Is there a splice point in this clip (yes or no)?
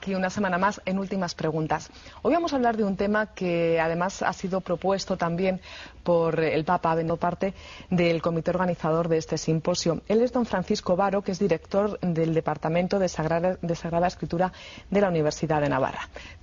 no